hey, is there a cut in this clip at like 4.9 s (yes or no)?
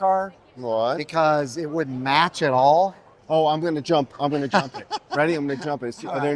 no